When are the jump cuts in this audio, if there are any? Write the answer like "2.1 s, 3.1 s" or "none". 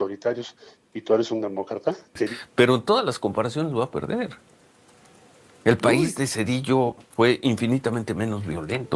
2.3 s